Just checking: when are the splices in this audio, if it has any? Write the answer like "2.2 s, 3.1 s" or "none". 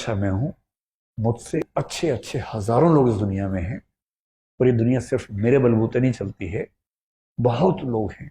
1.6 s